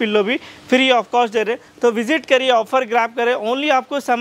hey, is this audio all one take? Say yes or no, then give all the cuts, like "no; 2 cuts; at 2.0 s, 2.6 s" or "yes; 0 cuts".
yes; 0 cuts